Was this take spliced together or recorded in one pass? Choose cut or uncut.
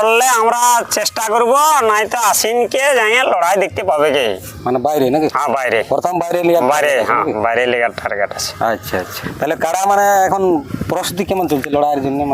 cut